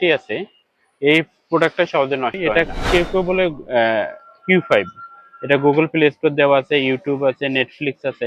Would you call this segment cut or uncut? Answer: cut